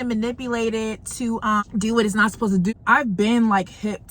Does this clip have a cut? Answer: yes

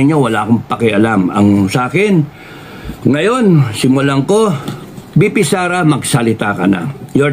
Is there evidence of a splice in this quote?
no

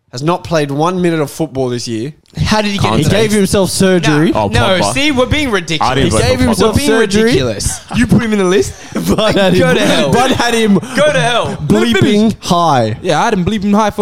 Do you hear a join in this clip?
yes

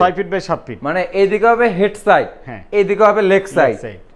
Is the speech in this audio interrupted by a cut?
no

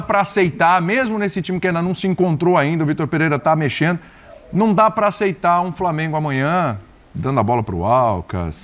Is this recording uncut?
yes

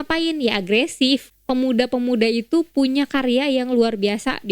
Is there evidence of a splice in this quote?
yes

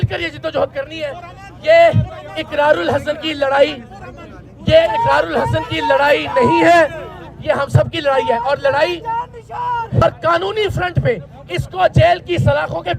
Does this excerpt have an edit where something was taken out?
yes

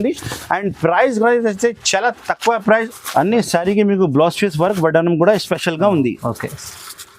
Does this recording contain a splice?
yes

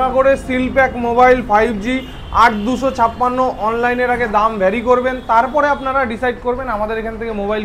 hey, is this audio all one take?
yes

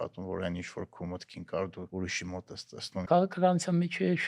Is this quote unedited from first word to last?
no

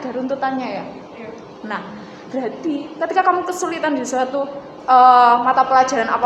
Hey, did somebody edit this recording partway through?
no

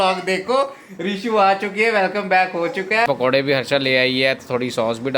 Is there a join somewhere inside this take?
yes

